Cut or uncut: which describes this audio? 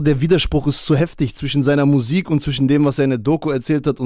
uncut